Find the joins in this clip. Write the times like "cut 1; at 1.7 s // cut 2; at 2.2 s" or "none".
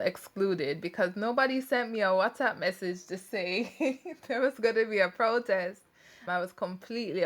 none